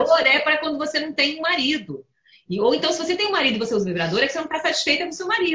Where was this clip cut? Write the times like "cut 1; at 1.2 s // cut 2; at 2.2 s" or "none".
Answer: none